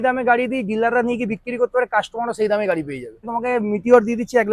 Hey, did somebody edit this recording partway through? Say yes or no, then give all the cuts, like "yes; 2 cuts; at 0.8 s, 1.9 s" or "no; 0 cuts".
yes; 1 cut; at 3.3 s